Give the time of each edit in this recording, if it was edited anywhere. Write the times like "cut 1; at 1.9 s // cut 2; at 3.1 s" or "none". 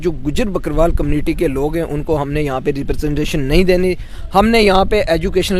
none